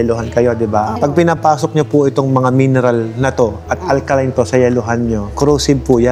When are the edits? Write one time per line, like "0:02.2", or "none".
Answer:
none